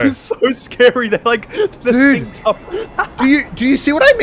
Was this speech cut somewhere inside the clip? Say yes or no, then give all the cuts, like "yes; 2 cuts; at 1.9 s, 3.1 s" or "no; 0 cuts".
no; 0 cuts